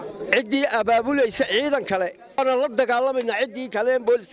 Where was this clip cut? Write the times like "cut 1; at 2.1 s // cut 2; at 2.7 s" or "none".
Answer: cut 1; at 2.4 s

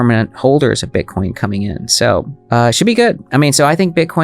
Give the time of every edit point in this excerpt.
cut 1; at 2.4 s

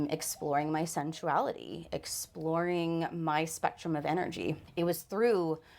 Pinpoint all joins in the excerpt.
cut 1; at 4.6 s

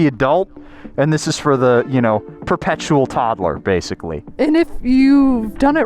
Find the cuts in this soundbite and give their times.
cut 1; at 4.2 s

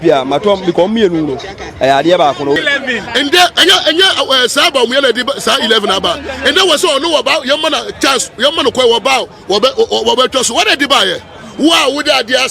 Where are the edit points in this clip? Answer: cut 1; at 2.6 s

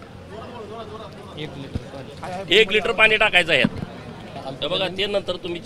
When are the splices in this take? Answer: cut 1; at 4.3 s

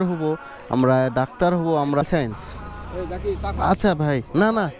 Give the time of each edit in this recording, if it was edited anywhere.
cut 1; at 2.0 s

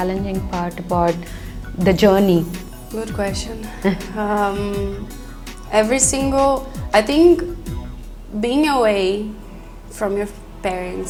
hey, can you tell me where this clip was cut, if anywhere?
none

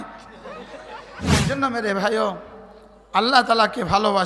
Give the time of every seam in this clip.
cut 1; at 1.4 s

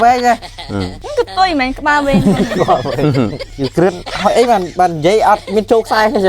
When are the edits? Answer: cut 1; at 1.0 s // cut 2; at 3.5 s

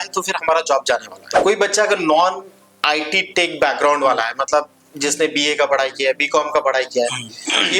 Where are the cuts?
cut 1; at 1.3 s

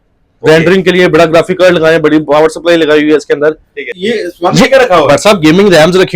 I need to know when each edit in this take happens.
cut 1; at 4.0 s

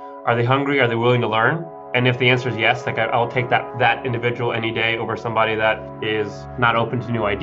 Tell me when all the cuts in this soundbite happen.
none

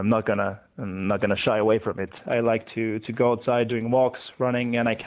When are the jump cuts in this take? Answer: cut 1; at 2.2 s // cut 2; at 3.7 s

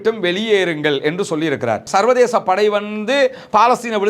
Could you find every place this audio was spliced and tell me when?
cut 1; at 1.8 s

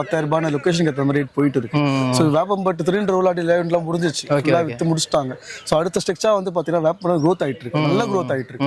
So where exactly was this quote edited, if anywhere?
none

